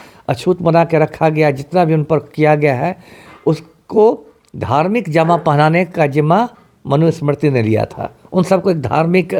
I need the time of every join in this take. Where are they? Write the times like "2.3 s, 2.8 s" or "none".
none